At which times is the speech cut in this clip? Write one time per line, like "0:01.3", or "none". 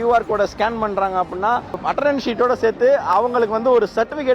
0:01.8